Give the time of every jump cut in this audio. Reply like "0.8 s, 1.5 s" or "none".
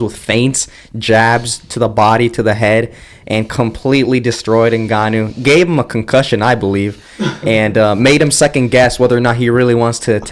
none